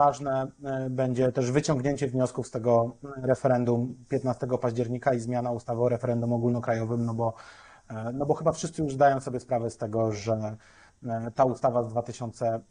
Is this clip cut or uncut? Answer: uncut